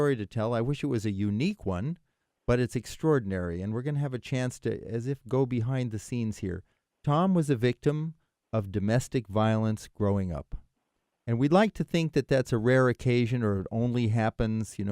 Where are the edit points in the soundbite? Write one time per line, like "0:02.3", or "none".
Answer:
0:12.8